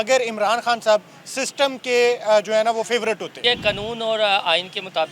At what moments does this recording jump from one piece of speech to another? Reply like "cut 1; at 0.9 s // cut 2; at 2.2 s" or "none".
cut 1; at 3.4 s